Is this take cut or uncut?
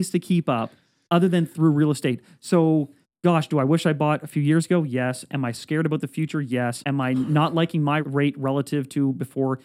cut